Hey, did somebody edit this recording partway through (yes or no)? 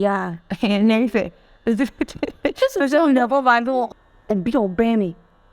yes